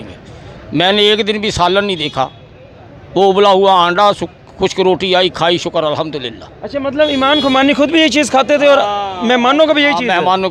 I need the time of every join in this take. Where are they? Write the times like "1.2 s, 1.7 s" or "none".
none